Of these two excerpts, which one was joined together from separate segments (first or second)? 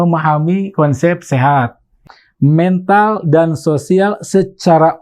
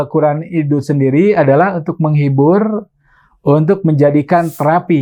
first